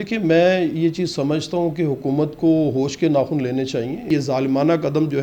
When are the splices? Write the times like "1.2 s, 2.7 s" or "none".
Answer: 4.1 s